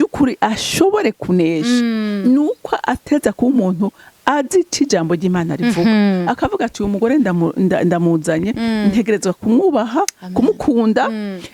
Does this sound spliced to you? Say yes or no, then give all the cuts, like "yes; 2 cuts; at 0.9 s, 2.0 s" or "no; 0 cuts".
no; 0 cuts